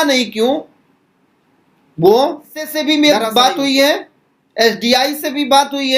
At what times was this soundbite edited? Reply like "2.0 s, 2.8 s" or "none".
2.8 s

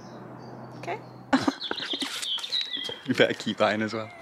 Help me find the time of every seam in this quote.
1.1 s

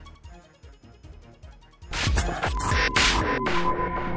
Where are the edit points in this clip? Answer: 1.9 s, 2.6 s

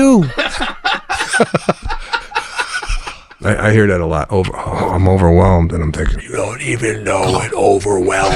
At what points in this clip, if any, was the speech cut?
3.3 s, 6.2 s

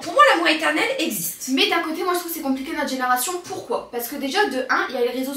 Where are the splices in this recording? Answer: none

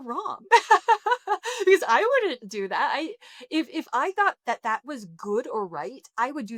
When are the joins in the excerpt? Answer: none

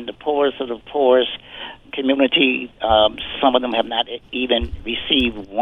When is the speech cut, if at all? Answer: 1.8 s

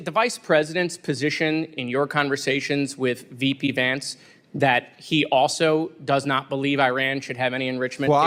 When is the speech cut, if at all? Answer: none

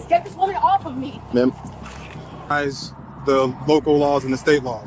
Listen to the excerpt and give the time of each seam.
2.5 s

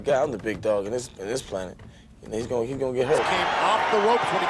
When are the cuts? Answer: 3.2 s

